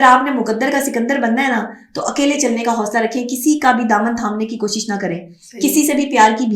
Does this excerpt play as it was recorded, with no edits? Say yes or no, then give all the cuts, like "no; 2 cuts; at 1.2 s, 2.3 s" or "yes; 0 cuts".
yes; 0 cuts